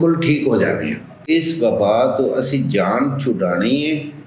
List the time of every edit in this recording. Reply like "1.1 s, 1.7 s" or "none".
1.2 s